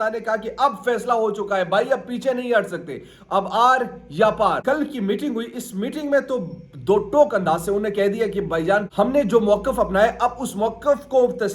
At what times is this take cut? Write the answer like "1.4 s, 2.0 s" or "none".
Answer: 4.6 s, 8.9 s